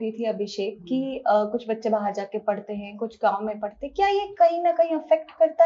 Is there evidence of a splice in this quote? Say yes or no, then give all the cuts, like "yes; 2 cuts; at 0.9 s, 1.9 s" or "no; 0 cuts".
no; 0 cuts